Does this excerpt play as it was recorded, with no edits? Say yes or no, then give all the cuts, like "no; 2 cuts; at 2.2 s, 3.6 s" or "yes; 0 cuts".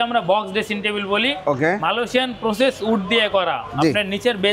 yes; 0 cuts